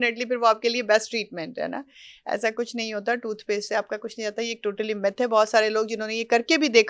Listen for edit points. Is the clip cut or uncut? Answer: uncut